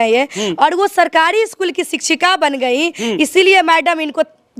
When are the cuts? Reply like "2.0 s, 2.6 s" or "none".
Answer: none